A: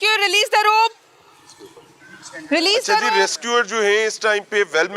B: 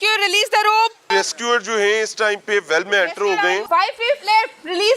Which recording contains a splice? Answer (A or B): B